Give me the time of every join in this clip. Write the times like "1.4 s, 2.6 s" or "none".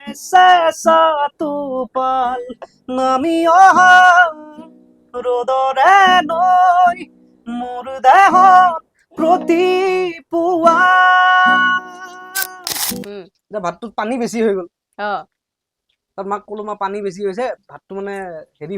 13.0 s